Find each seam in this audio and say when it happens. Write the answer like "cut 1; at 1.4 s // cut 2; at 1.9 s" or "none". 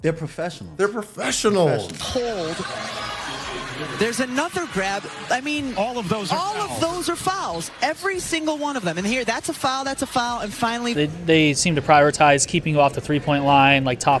cut 1; at 2.1 s // cut 2; at 10.9 s